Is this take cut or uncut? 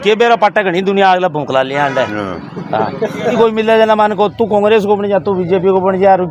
cut